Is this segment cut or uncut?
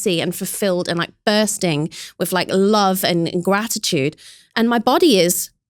uncut